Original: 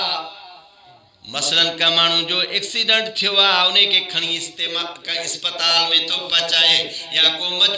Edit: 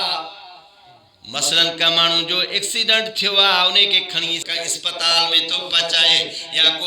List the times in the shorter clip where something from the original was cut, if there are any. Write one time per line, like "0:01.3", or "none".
0:04.5